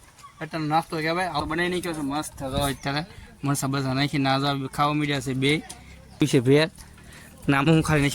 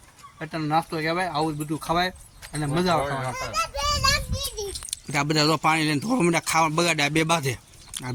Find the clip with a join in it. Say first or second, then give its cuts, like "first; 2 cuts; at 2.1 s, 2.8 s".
first; 2 cuts; at 1.4 s, 6.2 s